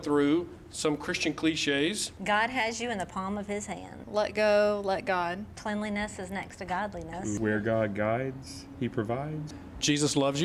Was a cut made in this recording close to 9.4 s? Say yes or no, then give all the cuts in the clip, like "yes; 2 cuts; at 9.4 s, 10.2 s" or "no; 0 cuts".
yes; 3 cuts; at 2.1 s, 7.4 s, 9.4 s